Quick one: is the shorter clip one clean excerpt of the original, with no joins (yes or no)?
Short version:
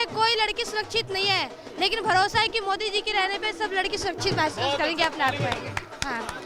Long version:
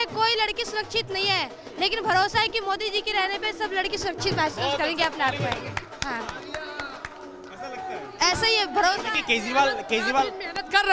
yes